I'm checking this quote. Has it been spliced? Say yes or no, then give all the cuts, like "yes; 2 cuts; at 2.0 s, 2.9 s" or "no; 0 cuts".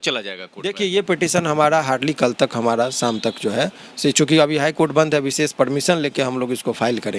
no; 0 cuts